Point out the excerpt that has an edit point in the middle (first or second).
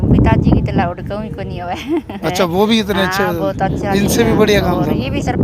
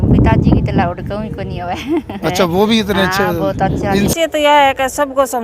second